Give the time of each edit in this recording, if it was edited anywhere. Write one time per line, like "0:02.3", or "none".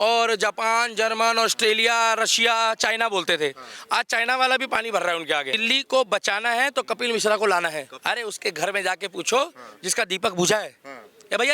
0:05.6
0:07.9